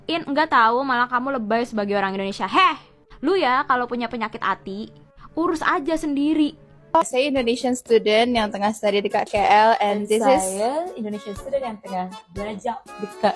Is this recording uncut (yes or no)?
no